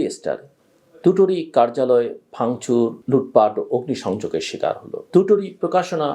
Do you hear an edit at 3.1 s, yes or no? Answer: no